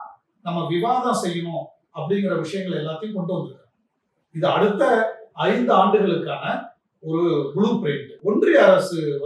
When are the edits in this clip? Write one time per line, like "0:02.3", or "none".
0:08.1